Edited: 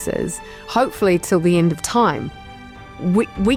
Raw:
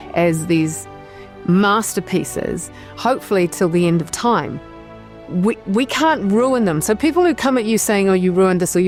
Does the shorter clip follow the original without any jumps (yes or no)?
yes